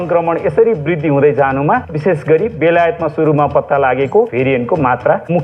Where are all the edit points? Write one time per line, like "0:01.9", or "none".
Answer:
0:01.9
0:04.3